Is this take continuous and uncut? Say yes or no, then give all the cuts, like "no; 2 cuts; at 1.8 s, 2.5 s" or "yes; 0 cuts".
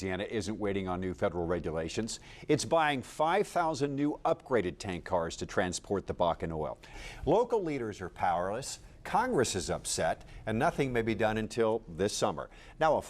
no; 1 cut; at 6.9 s